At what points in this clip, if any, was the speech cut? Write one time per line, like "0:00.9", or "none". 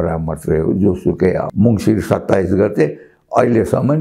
0:01.5